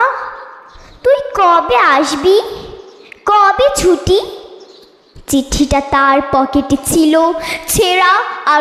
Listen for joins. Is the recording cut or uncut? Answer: uncut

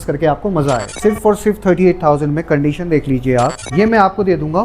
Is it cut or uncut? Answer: cut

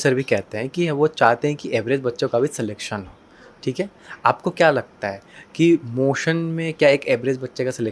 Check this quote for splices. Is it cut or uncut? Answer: uncut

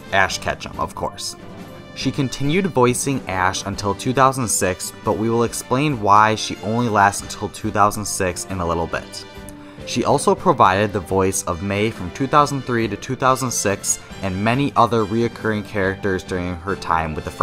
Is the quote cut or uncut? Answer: uncut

